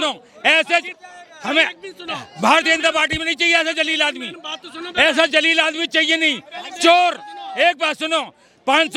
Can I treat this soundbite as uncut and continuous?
yes; 0 cuts

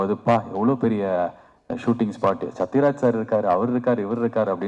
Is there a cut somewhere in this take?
no; 0 cuts

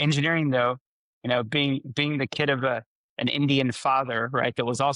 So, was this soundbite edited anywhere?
no; 0 cuts

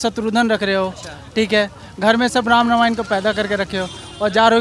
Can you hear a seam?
no; 0 cuts

